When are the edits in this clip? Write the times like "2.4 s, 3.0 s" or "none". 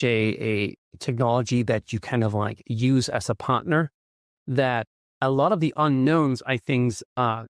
none